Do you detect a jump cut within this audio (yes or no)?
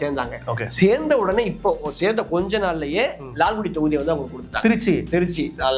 no